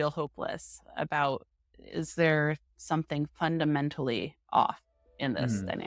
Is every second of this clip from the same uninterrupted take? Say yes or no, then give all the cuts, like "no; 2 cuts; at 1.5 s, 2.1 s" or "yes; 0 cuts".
yes; 0 cuts